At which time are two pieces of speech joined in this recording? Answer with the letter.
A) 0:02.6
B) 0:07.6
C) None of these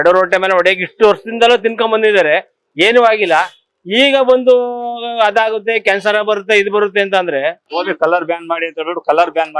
B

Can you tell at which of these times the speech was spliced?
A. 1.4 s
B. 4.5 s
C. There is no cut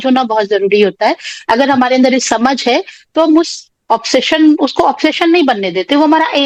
C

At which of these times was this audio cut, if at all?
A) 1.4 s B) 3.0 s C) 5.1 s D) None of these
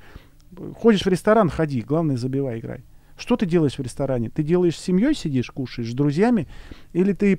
D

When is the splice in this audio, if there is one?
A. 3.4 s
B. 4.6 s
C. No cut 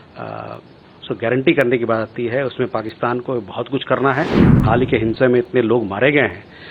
B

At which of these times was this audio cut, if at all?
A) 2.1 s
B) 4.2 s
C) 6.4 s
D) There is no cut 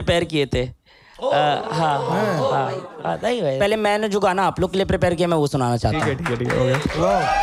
D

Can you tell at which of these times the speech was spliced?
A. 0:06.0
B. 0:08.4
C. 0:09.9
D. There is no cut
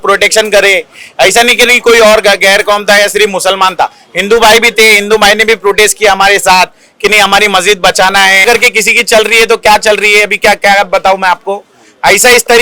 B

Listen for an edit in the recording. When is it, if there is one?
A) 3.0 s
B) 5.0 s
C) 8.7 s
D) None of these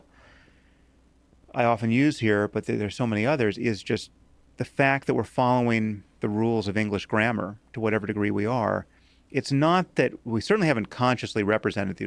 C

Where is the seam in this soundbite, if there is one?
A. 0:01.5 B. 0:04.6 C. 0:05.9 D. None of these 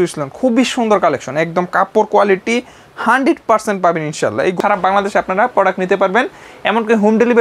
B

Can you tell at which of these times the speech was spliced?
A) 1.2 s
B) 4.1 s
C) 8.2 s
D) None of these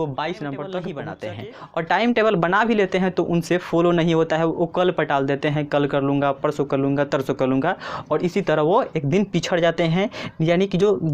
A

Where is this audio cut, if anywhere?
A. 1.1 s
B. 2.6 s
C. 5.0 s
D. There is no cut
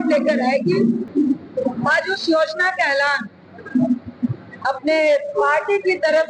A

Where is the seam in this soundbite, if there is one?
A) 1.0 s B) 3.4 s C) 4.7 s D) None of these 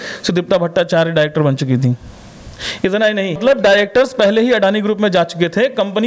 B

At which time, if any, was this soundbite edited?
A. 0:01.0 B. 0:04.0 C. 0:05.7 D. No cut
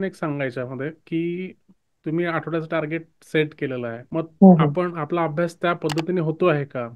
B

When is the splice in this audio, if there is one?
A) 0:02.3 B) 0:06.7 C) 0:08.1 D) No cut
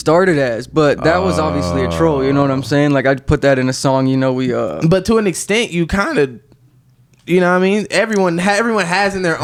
D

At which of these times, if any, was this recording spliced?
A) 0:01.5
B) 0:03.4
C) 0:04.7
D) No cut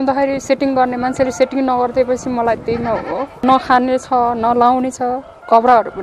B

